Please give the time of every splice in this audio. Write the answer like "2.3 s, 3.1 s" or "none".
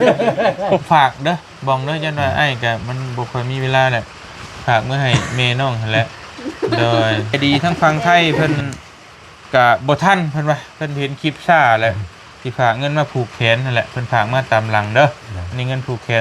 0.8 s, 7.4 s